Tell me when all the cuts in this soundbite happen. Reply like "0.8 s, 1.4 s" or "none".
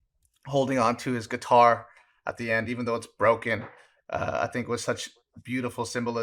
none